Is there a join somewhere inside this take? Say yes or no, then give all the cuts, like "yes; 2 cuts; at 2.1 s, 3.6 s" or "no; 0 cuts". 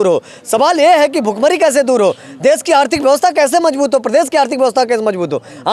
no; 0 cuts